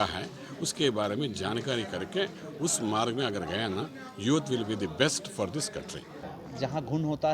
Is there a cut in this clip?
yes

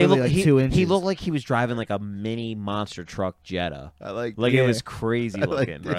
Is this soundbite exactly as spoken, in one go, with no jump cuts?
yes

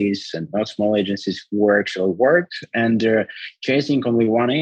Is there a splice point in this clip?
yes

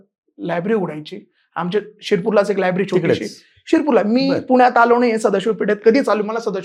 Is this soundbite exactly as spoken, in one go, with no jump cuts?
yes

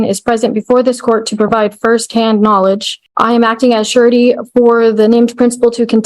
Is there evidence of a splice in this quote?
yes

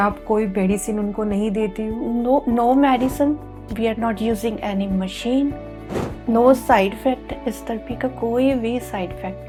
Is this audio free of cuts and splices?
yes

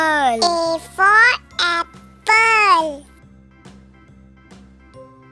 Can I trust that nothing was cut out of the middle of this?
yes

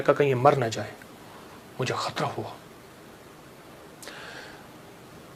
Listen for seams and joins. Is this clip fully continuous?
yes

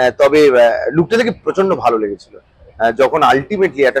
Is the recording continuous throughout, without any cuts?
yes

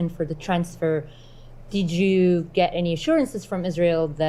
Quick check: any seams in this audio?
no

